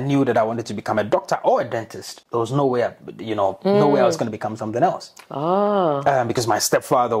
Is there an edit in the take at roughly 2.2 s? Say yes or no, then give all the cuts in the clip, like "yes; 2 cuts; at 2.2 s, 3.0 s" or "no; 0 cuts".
no; 0 cuts